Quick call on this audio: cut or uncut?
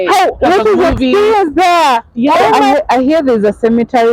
cut